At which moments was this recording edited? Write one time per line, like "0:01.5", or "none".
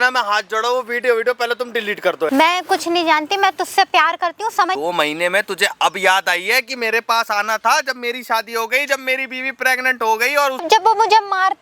0:02.3
0:04.8
0:10.6